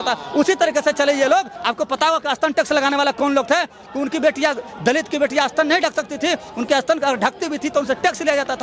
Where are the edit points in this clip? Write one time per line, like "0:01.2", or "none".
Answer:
0:01.6